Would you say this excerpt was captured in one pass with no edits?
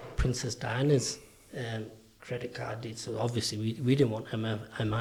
yes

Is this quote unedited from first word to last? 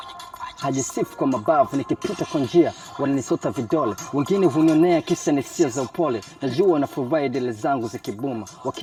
yes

